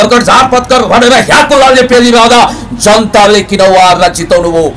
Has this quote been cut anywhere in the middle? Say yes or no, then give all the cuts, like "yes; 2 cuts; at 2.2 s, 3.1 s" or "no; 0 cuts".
no; 0 cuts